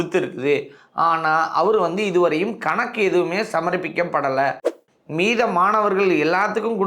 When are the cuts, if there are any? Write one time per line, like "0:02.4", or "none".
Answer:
0:04.7

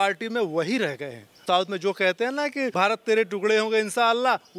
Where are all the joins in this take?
0:01.4
0:02.7

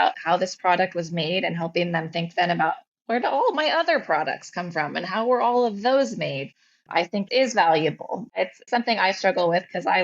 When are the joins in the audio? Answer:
0:08.3

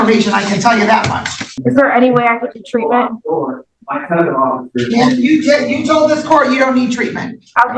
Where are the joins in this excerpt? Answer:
0:01.6

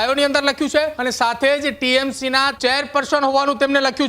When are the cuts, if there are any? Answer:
0:01.0
0:02.5

